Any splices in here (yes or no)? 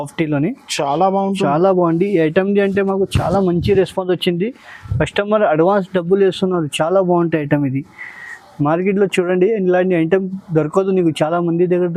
no